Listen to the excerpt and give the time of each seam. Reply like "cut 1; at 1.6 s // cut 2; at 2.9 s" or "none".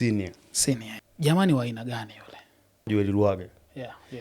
cut 1; at 0.9 s // cut 2; at 2.9 s